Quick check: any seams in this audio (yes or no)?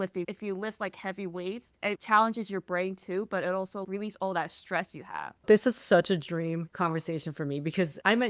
yes